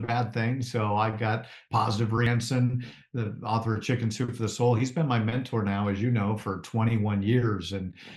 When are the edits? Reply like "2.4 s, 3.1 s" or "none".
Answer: 2.3 s